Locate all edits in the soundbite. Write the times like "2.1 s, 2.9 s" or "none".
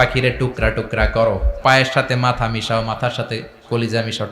1.5 s